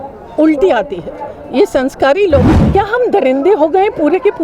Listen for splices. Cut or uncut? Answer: cut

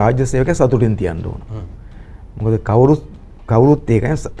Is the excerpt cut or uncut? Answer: uncut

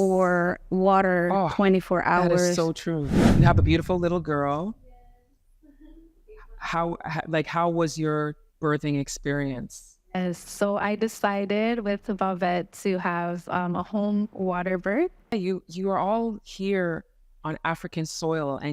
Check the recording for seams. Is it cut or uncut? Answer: cut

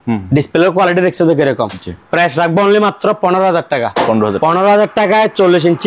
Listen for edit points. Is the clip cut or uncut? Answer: uncut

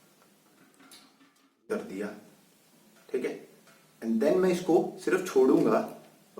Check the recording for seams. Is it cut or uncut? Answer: cut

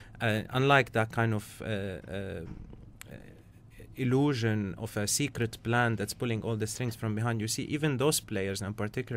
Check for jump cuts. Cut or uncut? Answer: uncut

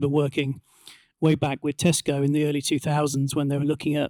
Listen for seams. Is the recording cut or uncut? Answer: uncut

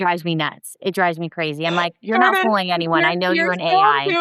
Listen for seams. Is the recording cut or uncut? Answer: uncut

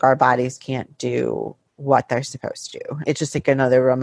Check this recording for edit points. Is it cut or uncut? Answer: uncut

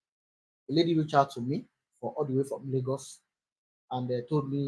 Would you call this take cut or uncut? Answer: cut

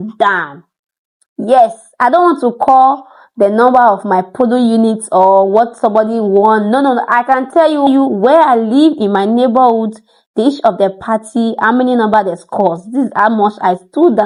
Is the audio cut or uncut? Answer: uncut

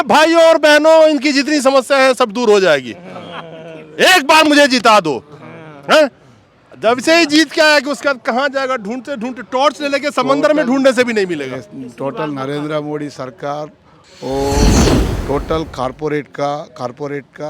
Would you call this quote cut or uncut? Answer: uncut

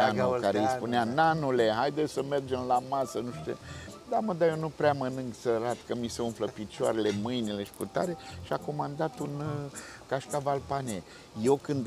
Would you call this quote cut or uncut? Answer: uncut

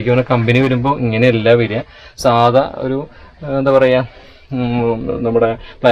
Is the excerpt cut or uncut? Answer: uncut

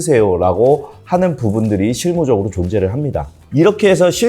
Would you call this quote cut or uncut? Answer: cut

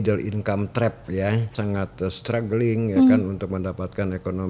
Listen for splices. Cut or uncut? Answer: cut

